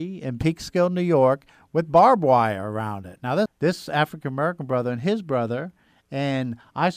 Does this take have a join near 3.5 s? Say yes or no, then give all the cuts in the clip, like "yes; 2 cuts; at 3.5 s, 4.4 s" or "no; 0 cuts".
yes; 1 cut; at 3.5 s